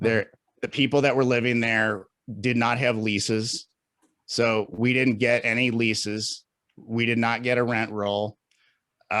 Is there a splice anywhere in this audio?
no; 0 cuts

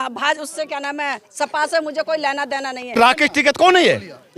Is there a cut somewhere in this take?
yes; 1 cut; at 3.0 s

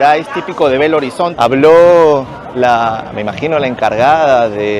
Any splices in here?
yes; 1 cut; at 1.3 s

